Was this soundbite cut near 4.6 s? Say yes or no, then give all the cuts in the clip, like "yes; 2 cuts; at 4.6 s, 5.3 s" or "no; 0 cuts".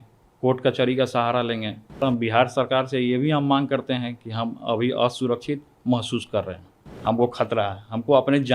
no; 2 cuts; at 2.0 s, 6.8 s